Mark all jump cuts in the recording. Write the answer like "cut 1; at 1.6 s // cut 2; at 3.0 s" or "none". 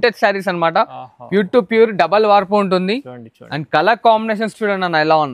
none